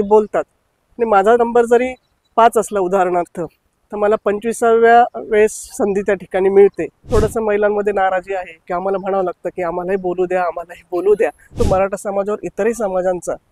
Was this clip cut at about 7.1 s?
yes; 2 cuts; at 7.1 s, 11.4 s

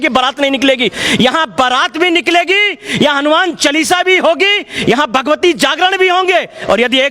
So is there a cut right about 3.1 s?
no; 0 cuts

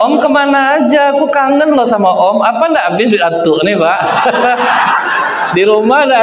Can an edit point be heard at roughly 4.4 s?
no; 0 cuts

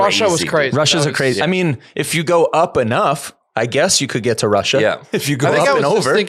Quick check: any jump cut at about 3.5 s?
no; 0 cuts

